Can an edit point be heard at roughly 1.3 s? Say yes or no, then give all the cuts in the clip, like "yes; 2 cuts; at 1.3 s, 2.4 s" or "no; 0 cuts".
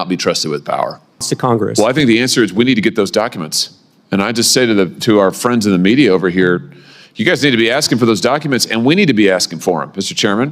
yes; 1 cut; at 1.3 s